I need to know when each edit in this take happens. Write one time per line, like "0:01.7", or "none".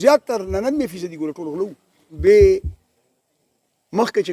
0:02.0